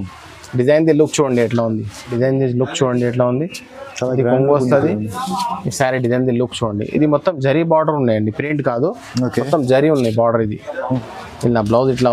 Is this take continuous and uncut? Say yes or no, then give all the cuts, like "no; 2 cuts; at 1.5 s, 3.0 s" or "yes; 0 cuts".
no; 2 cuts; at 2.1 s, 11.1 s